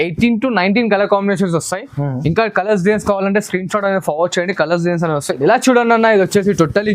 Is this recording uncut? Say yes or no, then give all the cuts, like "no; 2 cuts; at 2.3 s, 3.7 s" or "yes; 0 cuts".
no; 1 cut; at 5.4 s